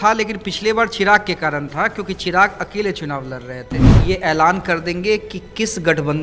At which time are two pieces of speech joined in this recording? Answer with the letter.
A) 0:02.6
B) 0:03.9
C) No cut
B